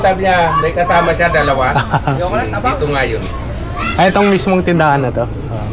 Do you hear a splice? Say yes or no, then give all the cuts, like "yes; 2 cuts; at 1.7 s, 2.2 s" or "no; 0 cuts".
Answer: no; 0 cuts